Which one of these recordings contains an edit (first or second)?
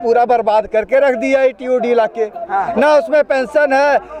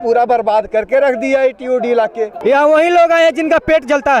second